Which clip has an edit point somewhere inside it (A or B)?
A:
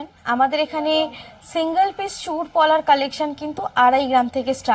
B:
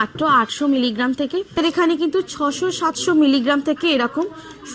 B